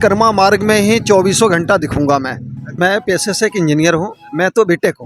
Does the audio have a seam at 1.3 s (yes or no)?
no